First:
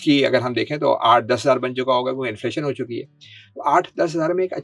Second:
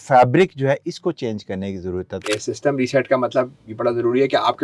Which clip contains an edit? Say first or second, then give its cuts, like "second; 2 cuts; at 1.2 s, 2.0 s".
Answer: second; 1 cut; at 2.2 s